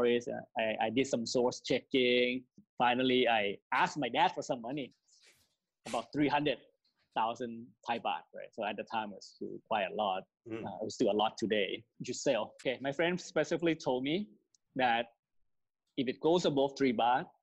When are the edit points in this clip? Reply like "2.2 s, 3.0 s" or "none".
none